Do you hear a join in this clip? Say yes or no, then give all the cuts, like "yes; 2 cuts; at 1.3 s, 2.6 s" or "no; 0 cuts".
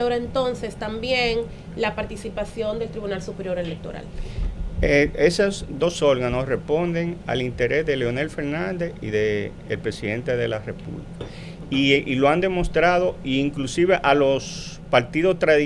no; 0 cuts